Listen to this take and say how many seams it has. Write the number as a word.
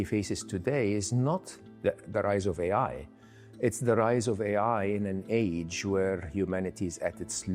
zero